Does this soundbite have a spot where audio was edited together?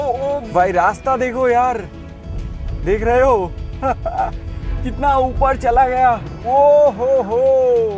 yes; 1 cut; at 6.3 s

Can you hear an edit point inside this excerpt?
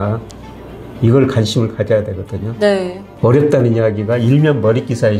yes; 1 cut; at 3.0 s

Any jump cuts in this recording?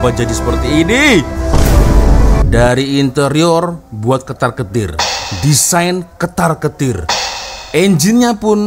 yes; 1 cut; at 2.4 s

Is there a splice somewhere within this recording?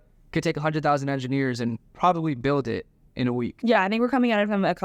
no; 0 cuts

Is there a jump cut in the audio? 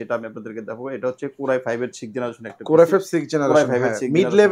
no; 0 cuts

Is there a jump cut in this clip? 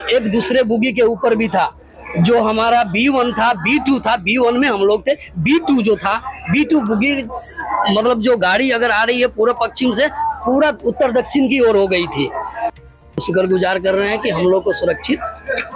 yes; 1 cut; at 12.8 s

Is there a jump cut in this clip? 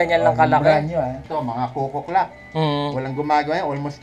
yes; 1 cut; at 1.2 s

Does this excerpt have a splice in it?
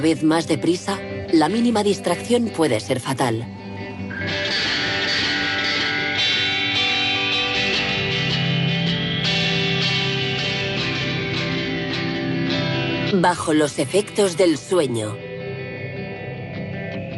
no; 0 cuts

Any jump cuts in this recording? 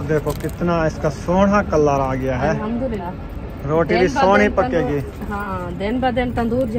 yes; 2 cuts; at 3.0 s, 5.5 s

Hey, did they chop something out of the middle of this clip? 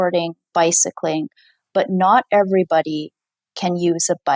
no; 0 cuts

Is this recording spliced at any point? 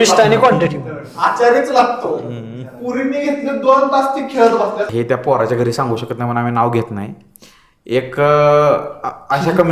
yes; 1 cut; at 4.9 s

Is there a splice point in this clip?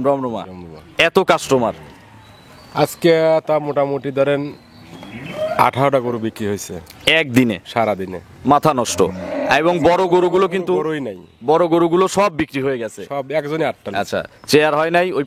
no; 0 cuts

